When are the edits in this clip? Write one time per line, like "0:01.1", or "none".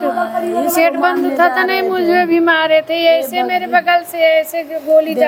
none